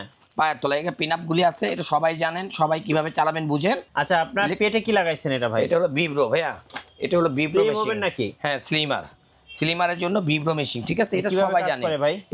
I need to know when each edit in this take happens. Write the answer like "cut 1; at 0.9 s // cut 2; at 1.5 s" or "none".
cut 1; at 3.9 s